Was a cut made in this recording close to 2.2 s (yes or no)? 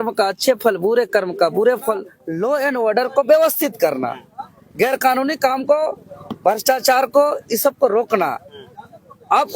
yes